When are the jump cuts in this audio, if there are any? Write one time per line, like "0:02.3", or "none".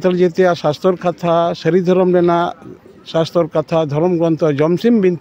none